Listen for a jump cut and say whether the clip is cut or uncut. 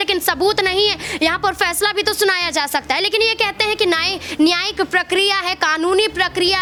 uncut